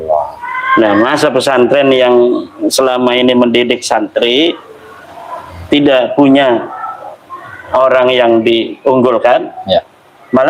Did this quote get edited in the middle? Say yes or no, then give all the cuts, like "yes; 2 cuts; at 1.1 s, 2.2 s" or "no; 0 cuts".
no; 0 cuts